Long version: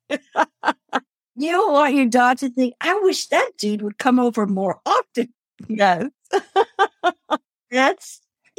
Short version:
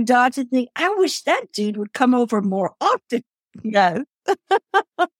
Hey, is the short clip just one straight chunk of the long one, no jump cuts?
yes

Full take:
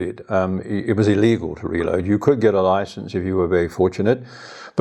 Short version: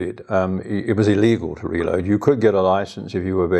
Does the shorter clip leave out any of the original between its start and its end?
no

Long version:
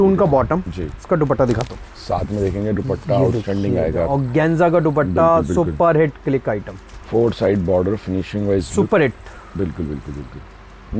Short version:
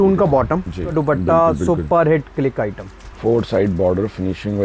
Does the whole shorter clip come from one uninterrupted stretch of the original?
no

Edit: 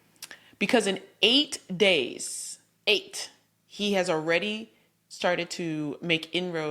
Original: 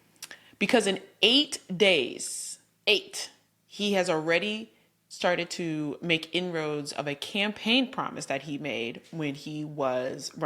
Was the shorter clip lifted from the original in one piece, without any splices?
yes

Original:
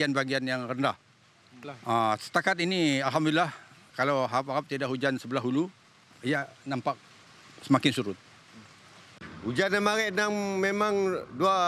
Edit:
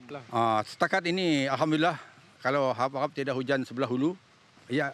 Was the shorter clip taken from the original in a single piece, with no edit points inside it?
yes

